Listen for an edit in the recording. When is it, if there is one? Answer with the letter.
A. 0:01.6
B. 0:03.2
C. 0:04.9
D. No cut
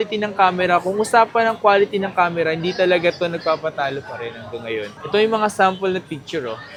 D